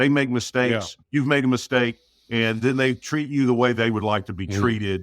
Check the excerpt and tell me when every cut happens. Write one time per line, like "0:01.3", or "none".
0:00.9